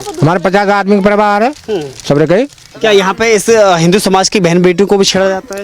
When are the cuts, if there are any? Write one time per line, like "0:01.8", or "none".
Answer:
0:02.7